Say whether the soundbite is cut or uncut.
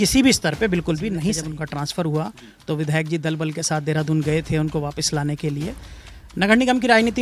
cut